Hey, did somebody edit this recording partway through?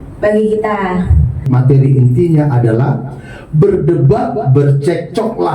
yes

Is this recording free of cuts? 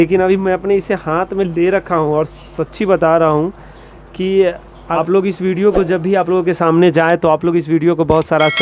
no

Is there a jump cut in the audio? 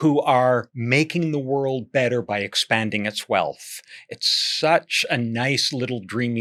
no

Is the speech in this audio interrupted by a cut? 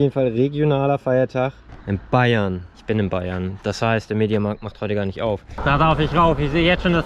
yes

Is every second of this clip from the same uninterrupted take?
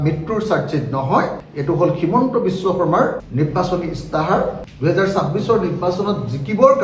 no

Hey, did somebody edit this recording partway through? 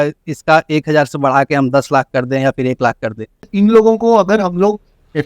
yes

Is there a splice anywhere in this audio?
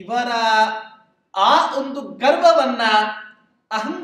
no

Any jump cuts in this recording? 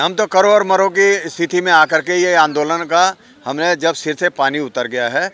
no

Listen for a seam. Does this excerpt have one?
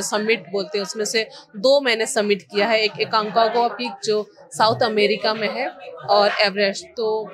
no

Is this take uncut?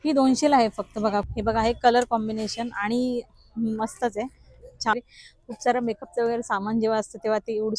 no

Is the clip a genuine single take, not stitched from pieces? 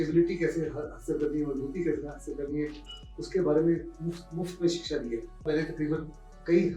no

